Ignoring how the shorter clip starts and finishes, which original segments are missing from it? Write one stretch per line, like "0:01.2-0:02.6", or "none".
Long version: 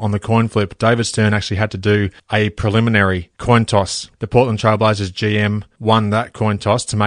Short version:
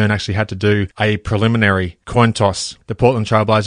0:02.1-0:02.2